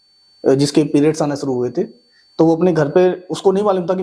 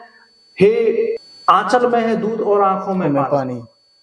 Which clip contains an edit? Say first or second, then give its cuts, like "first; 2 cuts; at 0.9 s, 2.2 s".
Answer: second; 1 cut; at 1.3 s